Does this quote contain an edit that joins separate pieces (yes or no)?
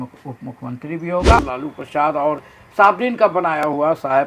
yes